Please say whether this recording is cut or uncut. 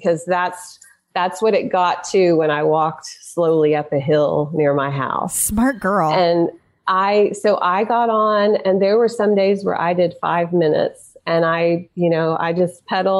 uncut